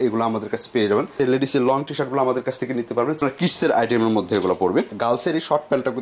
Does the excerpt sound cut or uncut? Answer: cut